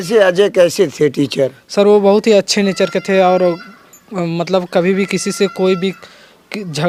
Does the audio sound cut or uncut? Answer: uncut